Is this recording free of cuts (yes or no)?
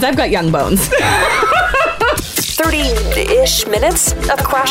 no